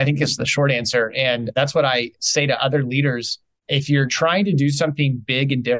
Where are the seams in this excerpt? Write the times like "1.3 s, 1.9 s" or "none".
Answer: none